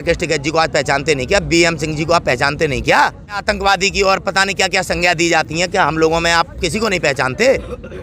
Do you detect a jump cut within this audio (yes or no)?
yes